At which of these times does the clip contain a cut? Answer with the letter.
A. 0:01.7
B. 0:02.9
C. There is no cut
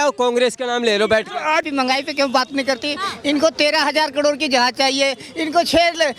A